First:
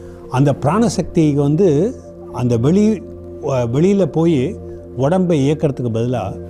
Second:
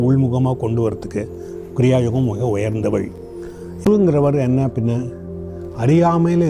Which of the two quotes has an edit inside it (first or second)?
second